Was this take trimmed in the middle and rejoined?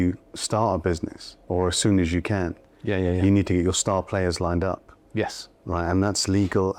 no; 0 cuts

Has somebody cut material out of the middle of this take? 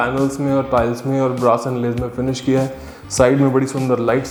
no; 0 cuts

